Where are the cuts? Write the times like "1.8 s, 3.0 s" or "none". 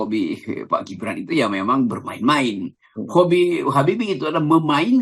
none